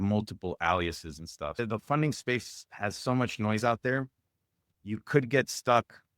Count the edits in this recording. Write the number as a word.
one